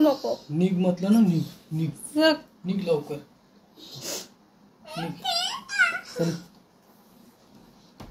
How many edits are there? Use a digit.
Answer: 0